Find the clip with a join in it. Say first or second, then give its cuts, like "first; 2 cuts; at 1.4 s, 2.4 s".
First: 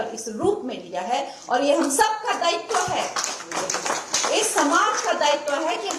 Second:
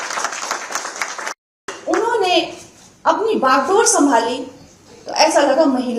second; 1 cut; at 1.7 s